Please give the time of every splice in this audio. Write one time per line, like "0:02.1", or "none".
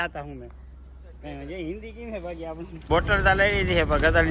0:02.8